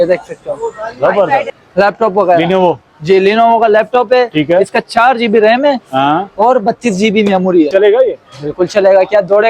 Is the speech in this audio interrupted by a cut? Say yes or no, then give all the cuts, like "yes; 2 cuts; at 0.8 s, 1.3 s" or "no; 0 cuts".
yes; 2 cuts; at 1.5 s, 7.7 s